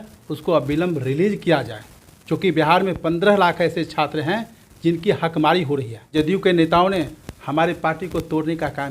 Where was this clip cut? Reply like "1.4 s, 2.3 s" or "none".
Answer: 6.1 s